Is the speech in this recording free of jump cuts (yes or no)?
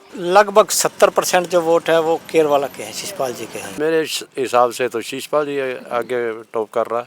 no